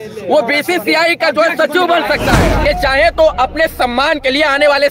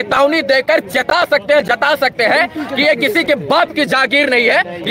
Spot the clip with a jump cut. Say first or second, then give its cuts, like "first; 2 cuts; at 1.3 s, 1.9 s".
first; 1 cut; at 2.6 s